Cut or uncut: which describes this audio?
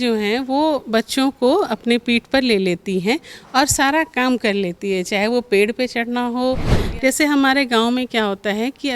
cut